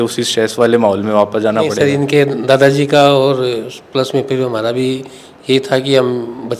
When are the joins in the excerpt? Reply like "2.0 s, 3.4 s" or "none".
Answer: 1.8 s